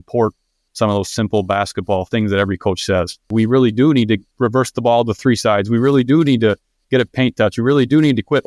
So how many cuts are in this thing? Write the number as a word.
one